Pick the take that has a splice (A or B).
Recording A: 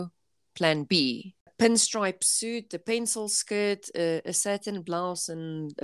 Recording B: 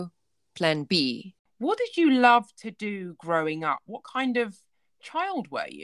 A